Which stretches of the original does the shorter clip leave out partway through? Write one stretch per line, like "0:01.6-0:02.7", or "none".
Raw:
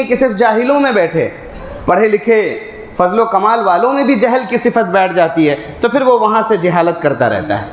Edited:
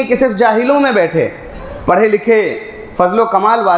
none